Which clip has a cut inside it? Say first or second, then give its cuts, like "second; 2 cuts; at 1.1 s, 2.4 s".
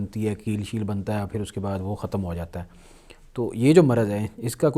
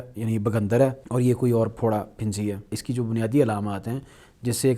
second; 2 cuts; at 1.0 s, 2.8 s